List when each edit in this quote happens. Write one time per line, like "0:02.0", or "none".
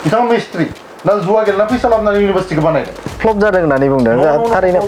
0:03.1